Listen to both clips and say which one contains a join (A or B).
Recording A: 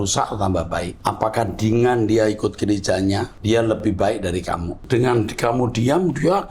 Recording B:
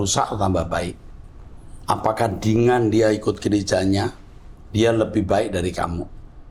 A